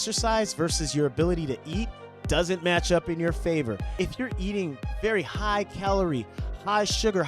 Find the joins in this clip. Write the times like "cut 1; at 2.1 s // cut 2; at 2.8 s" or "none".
cut 1; at 3.8 s